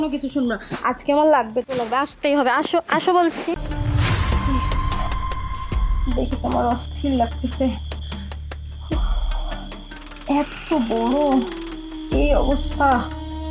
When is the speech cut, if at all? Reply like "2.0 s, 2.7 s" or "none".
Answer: 3.7 s